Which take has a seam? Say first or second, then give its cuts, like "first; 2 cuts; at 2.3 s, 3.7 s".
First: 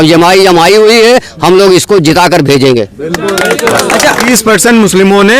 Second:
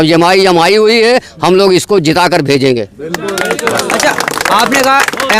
first; 1 cut; at 4.3 s